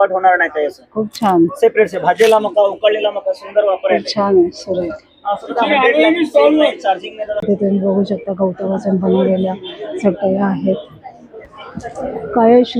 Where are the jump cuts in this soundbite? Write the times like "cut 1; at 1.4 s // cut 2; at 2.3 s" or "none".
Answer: none